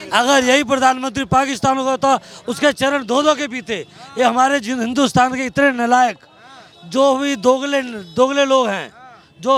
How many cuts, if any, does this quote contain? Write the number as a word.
zero